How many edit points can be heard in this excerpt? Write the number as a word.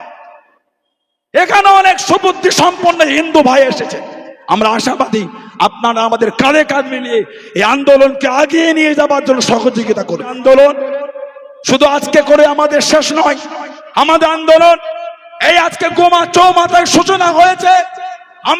one